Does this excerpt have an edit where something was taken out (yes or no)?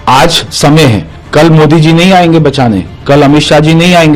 yes